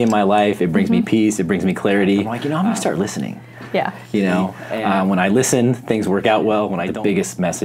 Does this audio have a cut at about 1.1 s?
no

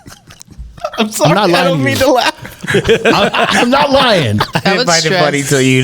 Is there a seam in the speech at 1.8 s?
no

